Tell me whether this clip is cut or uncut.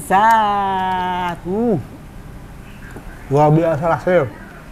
uncut